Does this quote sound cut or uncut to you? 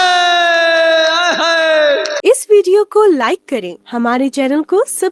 cut